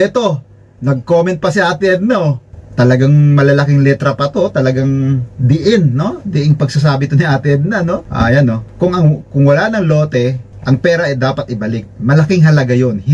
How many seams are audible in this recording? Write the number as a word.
three